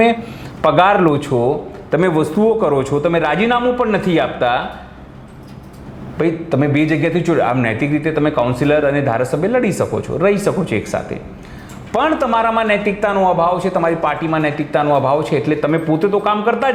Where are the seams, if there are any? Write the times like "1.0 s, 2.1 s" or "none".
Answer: none